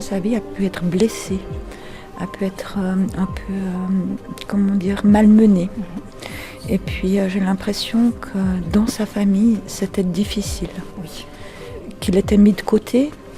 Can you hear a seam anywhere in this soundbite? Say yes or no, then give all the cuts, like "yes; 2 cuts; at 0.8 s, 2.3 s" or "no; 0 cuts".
yes; 1 cut; at 11.9 s